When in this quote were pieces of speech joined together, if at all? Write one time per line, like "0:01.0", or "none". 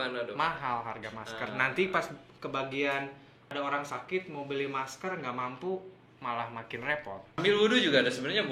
0:07.4